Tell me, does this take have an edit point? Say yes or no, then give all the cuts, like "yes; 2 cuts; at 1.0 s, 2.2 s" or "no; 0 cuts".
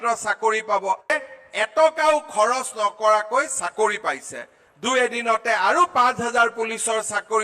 yes; 1 cut; at 1.1 s